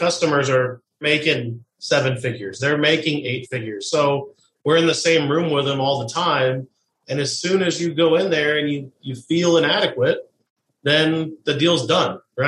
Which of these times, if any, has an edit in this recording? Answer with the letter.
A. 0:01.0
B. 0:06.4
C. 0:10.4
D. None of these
A